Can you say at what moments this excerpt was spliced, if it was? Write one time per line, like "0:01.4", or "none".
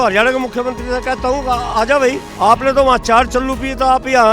0:02.3